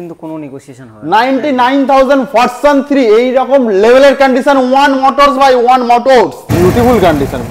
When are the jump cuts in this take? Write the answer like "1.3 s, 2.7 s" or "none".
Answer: 6.5 s